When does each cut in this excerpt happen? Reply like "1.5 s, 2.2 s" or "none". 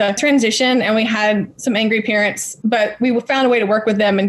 none